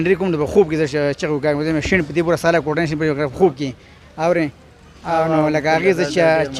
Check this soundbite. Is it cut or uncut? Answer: uncut